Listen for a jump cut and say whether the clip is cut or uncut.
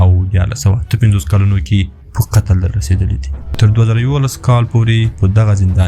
cut